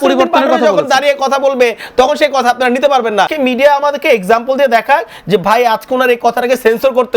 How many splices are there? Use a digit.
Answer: 1